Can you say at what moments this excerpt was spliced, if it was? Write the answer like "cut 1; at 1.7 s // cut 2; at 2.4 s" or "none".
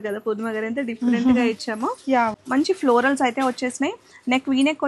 cut 1; at 2.3 s